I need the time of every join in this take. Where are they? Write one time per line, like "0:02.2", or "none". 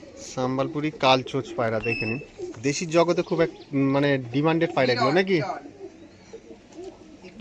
none